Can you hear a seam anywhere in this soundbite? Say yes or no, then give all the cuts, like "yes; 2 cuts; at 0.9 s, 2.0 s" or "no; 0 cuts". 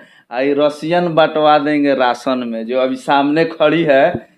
no; 0 cuts